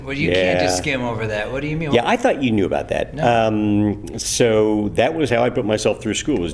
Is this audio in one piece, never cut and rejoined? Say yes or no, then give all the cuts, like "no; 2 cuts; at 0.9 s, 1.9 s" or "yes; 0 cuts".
yes; 0 cuts